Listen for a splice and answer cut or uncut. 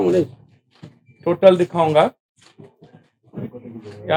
uncut